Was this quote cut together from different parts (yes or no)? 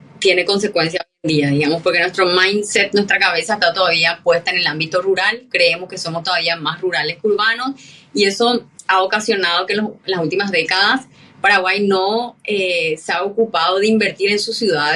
no